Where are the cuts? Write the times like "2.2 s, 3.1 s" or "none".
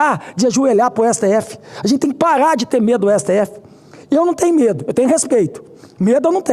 none